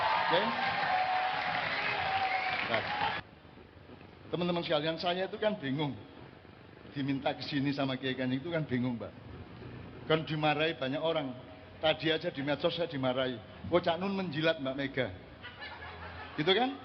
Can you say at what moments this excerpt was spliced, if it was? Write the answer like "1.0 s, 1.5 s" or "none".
3.2 s